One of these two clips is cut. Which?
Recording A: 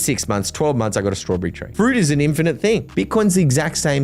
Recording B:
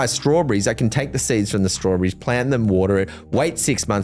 A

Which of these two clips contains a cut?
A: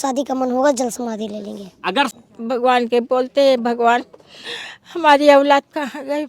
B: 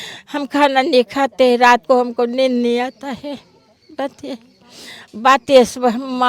A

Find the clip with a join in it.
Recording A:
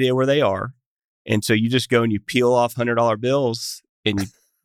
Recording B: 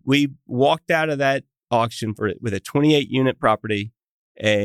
B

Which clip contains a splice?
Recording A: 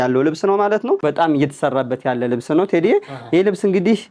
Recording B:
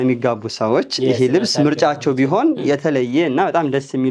A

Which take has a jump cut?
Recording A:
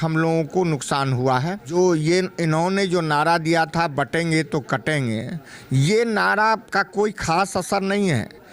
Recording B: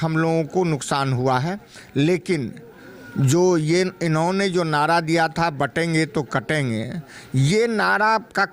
A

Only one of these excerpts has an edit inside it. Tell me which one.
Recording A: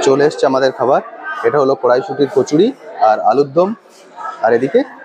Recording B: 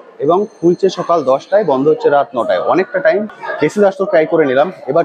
B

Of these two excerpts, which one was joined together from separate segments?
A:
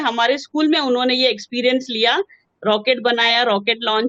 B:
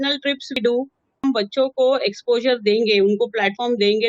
B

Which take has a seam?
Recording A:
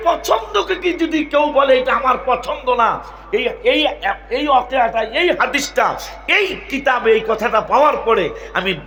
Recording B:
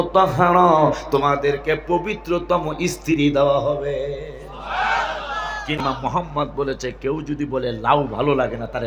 B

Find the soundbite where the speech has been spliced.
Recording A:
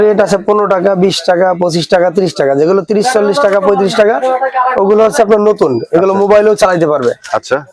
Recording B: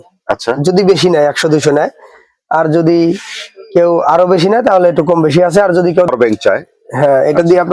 B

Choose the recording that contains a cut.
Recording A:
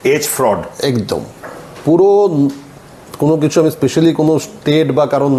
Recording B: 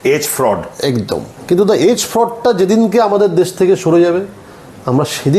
B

